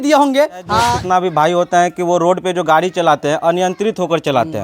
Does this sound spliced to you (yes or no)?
yes